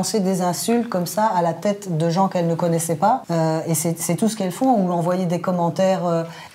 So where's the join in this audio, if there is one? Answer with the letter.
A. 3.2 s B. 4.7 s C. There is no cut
A